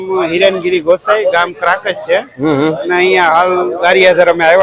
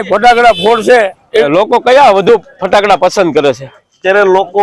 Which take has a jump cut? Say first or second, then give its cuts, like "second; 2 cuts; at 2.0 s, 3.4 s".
second; 1 cut; at 1.5 s